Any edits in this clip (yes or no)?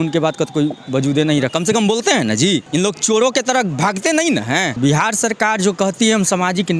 yes